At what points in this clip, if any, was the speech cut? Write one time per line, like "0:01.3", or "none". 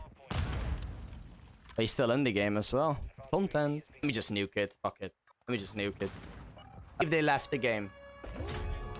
0:04.0
0:07.0